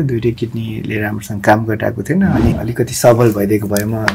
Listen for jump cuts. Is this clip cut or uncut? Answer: cut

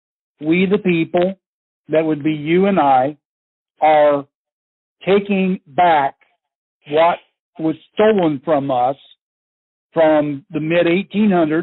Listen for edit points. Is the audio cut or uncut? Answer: uncut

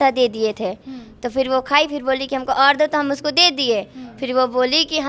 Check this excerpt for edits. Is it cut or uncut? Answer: uncut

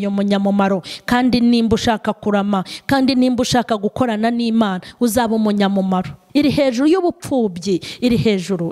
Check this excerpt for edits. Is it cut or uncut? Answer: cut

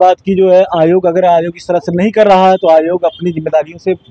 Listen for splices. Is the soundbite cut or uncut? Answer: uncut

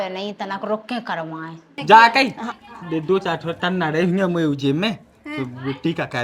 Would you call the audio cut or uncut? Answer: cut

